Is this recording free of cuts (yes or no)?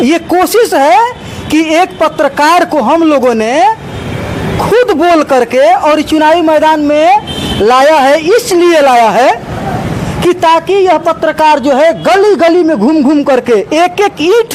yes